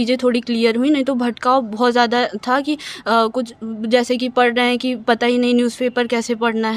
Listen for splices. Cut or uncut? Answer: uncut